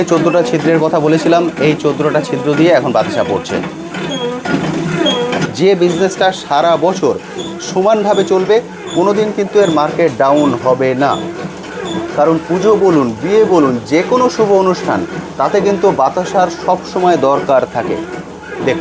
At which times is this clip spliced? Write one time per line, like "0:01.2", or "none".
0:05.4